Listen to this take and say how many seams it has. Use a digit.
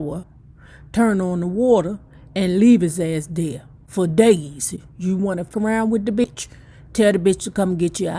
2